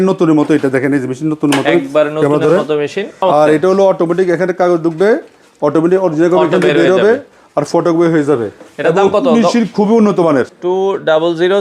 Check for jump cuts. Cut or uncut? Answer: cut